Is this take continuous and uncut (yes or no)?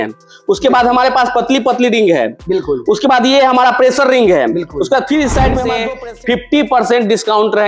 no